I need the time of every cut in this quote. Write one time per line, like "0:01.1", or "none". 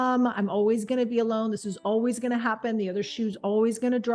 none